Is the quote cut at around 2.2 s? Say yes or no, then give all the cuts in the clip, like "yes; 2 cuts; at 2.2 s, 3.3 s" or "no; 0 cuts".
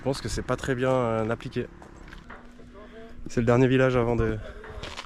yes; 1 cut; at 2.2 s